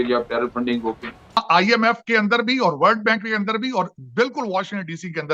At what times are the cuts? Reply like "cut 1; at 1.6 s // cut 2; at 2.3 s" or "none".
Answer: cut 1; at 1.4 s